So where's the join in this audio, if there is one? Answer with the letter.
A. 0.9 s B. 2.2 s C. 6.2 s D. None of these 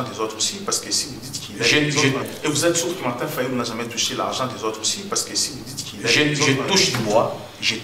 B